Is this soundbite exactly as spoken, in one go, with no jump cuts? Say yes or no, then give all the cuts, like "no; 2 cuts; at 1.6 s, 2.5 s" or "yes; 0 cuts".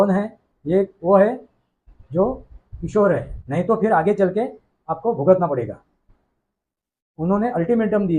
no; 1 cut; at 3.4 s